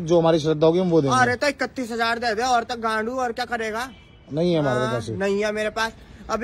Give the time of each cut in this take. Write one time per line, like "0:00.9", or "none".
none